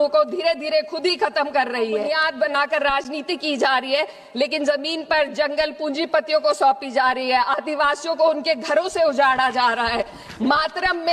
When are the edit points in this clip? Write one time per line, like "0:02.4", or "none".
0:02.1